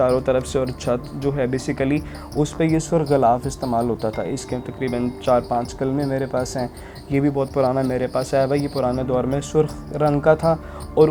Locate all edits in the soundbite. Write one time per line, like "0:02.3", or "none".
none